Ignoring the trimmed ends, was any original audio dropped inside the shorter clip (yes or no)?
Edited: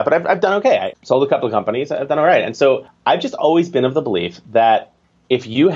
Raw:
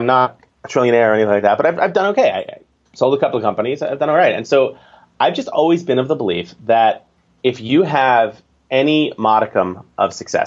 yes